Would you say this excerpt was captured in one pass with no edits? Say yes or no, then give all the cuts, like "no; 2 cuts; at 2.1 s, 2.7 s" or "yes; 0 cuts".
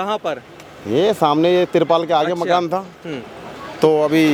yes; 0 cuts